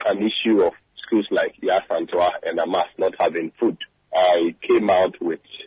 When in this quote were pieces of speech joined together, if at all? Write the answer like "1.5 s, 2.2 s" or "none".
0.9 s, 3.9 s